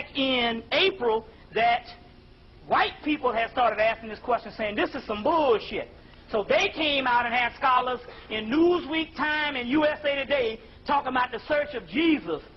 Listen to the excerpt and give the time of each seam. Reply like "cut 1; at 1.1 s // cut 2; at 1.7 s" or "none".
cut 1; at 3.3 s